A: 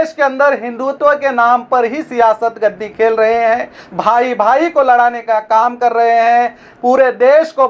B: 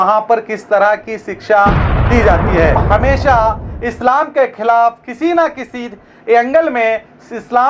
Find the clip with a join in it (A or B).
B